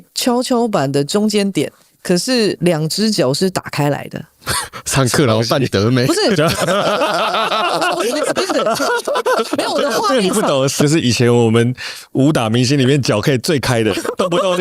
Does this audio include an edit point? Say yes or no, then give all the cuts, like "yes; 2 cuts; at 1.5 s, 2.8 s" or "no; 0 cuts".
yes; 2 cuts; at 2.6 s, 10.8 s